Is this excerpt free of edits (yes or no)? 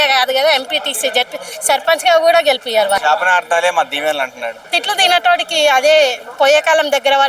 no